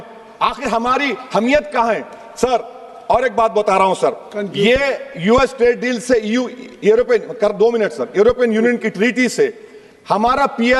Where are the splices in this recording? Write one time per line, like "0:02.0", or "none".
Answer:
none